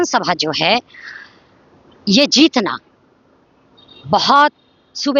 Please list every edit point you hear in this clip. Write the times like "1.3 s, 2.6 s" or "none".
none